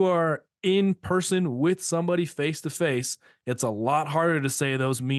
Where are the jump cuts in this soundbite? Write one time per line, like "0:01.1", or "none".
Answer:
none